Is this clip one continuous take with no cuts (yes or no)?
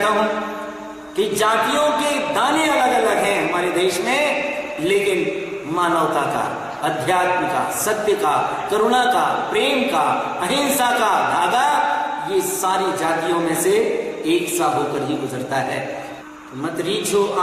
no